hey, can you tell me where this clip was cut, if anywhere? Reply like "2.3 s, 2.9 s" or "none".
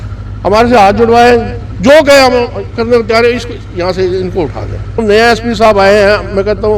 5.0 s